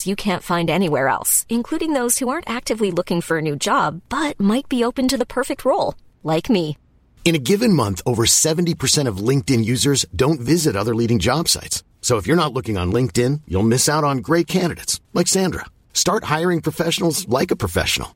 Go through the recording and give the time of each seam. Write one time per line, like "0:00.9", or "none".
none